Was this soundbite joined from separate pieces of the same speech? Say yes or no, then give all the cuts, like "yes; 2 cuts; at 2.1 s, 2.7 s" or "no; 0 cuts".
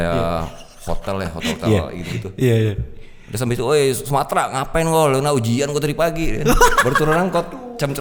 no; 0 cuts